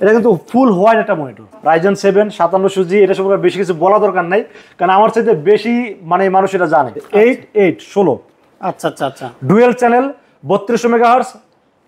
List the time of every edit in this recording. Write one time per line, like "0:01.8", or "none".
0:01.5
0:07.0